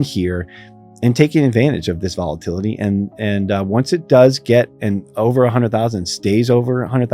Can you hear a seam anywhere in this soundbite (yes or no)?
no